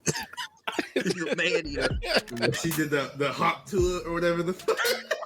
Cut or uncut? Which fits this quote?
cut